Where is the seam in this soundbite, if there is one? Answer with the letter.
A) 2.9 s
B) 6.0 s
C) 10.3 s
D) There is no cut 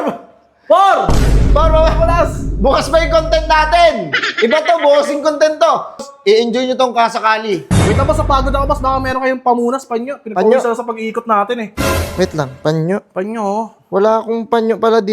B